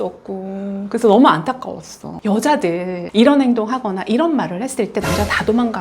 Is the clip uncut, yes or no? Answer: no